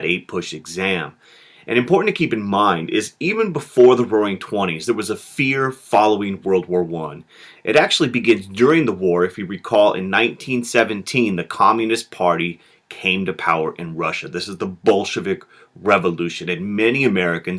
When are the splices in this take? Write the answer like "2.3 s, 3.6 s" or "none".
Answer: 14.0 s